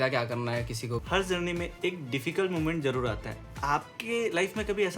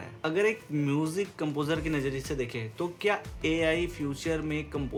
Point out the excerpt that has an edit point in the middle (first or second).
first